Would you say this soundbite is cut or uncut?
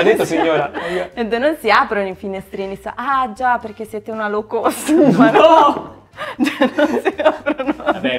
uncut